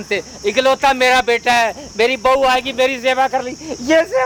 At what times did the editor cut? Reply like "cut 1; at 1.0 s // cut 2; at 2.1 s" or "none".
none